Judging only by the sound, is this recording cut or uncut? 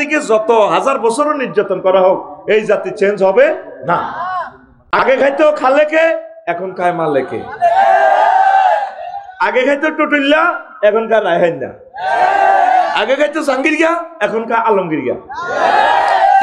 cut